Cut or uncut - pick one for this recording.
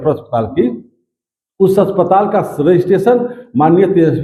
uncut